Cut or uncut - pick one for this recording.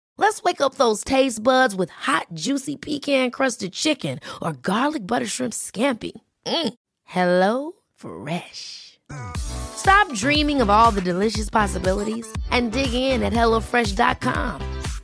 uncut